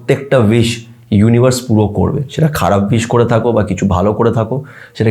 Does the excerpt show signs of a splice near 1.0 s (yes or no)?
no